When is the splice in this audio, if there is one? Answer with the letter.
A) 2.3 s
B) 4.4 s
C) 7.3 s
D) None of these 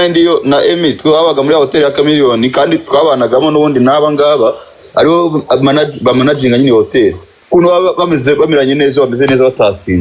C